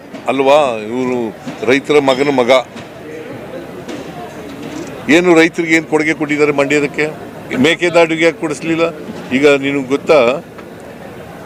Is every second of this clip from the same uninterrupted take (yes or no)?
yes